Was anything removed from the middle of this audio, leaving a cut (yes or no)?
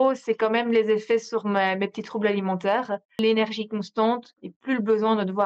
yes